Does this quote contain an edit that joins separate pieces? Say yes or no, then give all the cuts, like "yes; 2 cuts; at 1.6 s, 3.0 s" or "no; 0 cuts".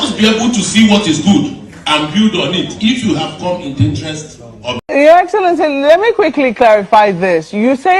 yes; 1 cut; at 4.8 s